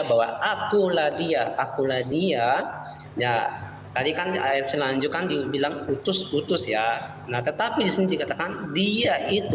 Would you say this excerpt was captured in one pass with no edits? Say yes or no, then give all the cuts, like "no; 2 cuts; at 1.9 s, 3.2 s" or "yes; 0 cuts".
yes; 0 cuts